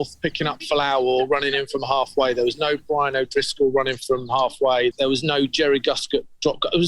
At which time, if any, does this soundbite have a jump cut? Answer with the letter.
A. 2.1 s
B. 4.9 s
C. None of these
B